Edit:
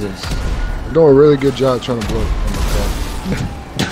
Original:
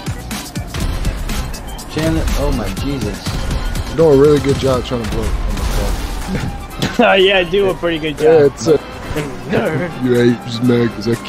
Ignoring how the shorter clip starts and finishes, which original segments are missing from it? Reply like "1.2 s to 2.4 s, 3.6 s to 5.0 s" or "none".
none